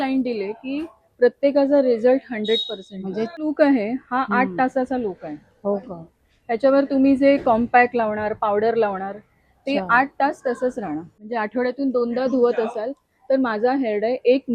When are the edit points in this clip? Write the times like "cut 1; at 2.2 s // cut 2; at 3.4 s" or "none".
cut 1; at 3.4 s // cut 2; at 11.2 s